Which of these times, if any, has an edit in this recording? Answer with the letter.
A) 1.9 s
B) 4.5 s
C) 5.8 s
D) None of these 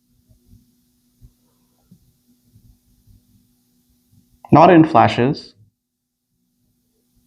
A